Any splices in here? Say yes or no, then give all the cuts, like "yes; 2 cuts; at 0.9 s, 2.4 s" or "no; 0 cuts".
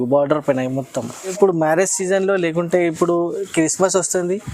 yes; 1 cut; at 1.3 s